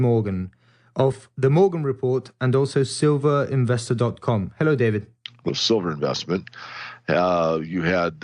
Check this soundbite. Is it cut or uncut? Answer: uncut